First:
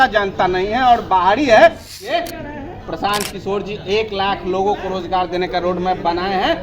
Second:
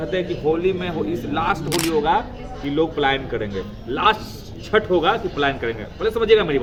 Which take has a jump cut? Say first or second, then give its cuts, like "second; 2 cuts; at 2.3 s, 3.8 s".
first; 1 cut; at 2.3 s